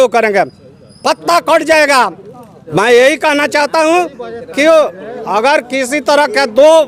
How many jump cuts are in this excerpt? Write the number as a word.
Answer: zero